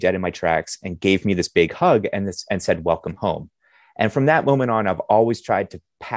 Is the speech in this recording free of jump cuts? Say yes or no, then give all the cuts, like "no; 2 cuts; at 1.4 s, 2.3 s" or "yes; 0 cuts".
yes; 0 cuts